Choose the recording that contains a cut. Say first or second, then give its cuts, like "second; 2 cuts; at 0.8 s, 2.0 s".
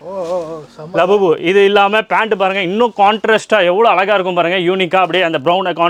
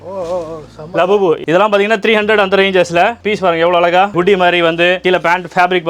second; 2 cuts; at 1.4 s, 4.1 s